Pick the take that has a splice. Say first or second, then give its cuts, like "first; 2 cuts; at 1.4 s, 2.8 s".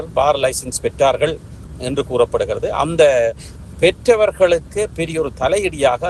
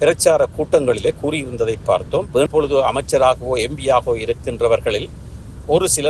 second; 1 cut; at 2.5 s